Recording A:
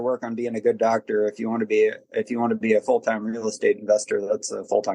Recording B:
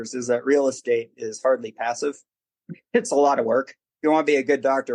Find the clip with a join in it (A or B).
B